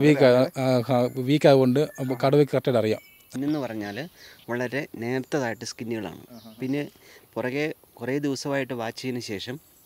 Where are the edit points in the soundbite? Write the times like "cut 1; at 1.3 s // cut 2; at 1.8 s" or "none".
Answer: cut 1; at 3.2 s